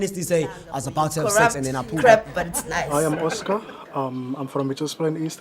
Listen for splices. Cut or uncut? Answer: cut